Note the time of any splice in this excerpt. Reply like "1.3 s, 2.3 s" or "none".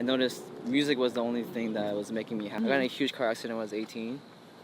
2.5 s

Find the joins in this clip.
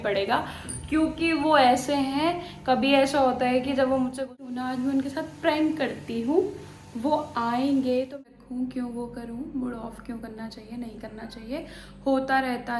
4.3 s, 8.2 s

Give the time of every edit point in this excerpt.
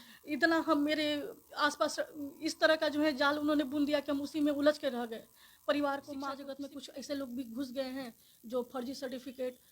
6.5 s

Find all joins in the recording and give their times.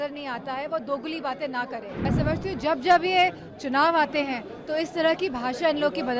1.8 s

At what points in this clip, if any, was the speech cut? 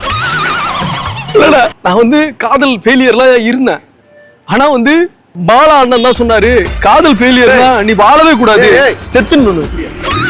1.8 s, 5.3 s

